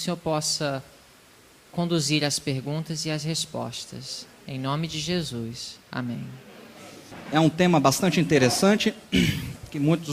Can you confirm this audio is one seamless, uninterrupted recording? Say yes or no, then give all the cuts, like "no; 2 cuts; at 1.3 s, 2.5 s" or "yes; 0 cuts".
no; 1 cut; at 8.3 s